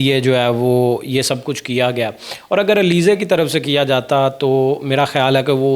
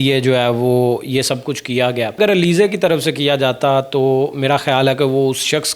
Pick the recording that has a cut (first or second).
second